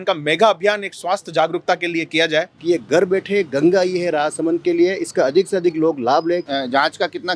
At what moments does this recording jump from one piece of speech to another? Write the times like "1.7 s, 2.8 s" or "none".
2.5 s, 6.4 s

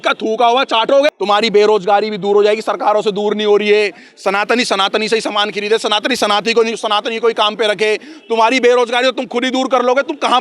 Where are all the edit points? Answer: 1.1 s

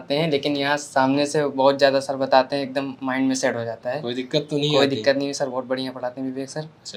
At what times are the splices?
none

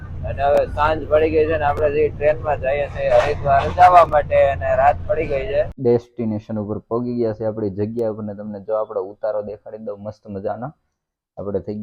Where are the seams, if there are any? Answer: 5.7 s

